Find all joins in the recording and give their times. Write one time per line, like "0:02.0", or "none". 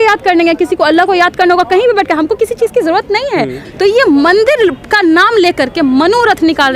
0:03.6